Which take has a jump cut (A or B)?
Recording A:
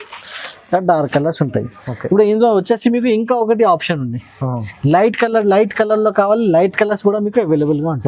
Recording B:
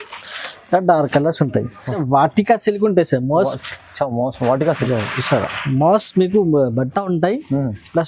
B